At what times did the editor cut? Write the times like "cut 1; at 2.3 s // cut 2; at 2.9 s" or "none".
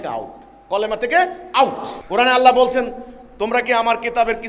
cut 1; at 1.9 s